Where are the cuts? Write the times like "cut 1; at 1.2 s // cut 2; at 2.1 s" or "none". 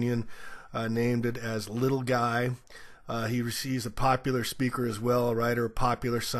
none